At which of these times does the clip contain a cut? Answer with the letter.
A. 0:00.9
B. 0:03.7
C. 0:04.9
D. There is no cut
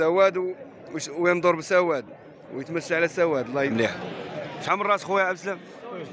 B